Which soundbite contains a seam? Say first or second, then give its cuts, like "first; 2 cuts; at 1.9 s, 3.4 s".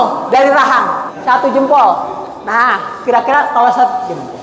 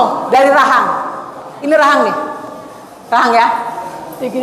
first; 1 cut; at 1.1 s